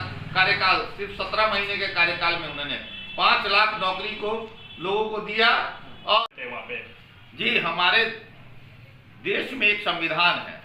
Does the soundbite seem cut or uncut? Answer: cut